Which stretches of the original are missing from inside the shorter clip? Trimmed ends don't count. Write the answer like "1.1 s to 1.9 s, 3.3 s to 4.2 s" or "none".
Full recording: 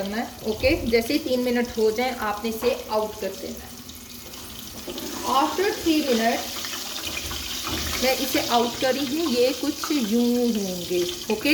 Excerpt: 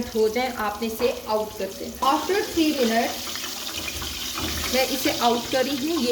3.6 s to 5.3 s